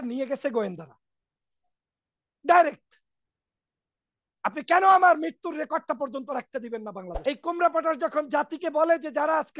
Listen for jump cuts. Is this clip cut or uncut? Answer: cut